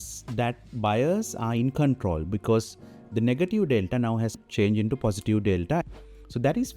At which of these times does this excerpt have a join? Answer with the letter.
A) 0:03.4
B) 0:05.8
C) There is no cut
B